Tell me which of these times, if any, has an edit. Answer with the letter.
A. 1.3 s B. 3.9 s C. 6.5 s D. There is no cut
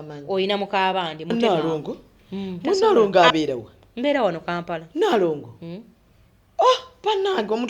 A